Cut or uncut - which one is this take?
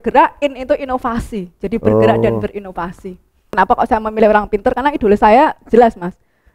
cut